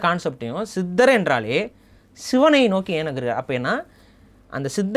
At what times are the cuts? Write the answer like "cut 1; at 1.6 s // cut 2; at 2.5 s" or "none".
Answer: none